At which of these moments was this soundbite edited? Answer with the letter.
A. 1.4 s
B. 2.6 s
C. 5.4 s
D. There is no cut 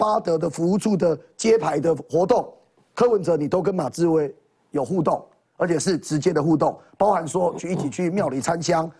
D